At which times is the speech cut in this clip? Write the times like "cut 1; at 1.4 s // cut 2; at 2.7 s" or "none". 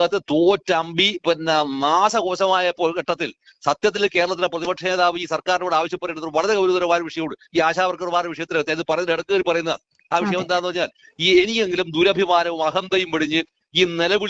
none

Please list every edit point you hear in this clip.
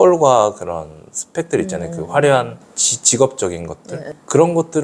none

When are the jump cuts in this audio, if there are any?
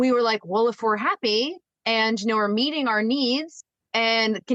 none

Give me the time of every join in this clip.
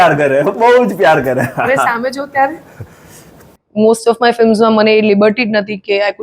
cut 1; at 3.6 s

